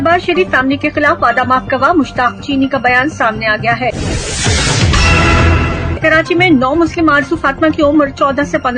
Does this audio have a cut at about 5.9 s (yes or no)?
yes